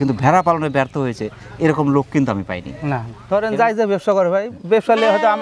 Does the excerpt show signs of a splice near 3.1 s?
yes; 1 cut; at 3.1 s

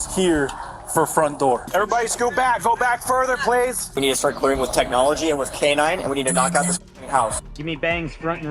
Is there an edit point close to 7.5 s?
yes; 3 cuts; at 1.7 s, 3.8 s, 7.5 s

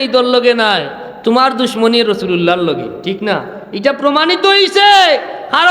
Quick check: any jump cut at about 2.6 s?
no; 0 cuts

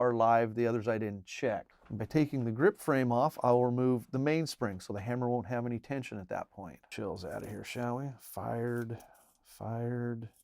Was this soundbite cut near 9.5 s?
no; 2 cuts; at 1.8 s, 6.9 s

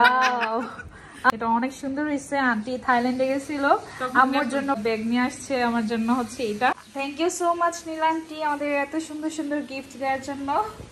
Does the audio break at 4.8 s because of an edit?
yes; 3 cuts; at 1.3 s, 4.8 s, 6.9 s

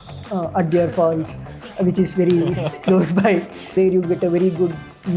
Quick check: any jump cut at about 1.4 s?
no; 1 cut; at 3.7 s

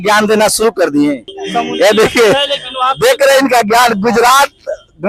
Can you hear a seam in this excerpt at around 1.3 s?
yes; 1 cut; at 1.3 s

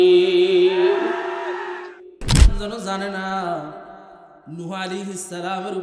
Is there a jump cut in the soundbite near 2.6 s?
yes; 1 cut; at 2.6 s

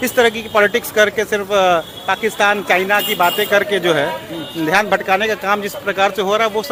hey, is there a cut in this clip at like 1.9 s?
no; 0 cuts

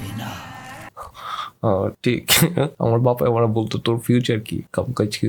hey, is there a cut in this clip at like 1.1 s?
no; 1 cut; at 2.7 s

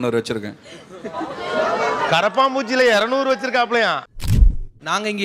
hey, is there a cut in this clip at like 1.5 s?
no; 1 cut; at 4.3 s

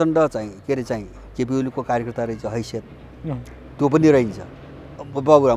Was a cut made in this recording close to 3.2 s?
no; 0 cuts

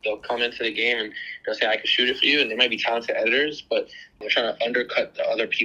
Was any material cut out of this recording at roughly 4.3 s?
yes; 1 cut; at 4.3 s

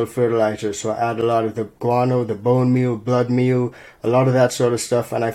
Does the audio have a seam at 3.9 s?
no; 0 cuts

